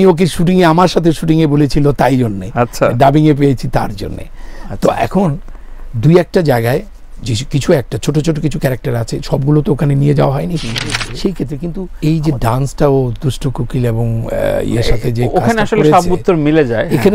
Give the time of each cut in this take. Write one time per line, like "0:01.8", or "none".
0:11.8